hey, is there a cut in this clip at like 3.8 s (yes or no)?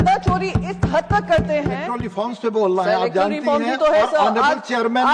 no